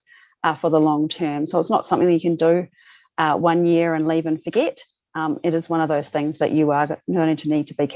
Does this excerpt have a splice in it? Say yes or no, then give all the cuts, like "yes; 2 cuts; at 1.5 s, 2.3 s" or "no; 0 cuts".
no; 0 cuts